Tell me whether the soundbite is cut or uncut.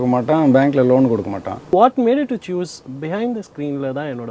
cut